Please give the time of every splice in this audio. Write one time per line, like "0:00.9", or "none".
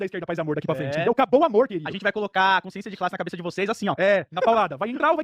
none